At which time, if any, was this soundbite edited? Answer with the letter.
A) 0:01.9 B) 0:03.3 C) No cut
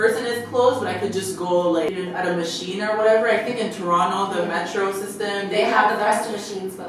A